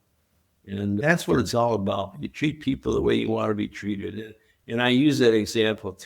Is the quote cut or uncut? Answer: cut